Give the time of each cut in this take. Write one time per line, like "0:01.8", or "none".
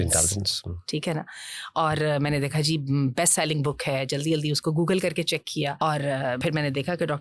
0:05.8
0:06.4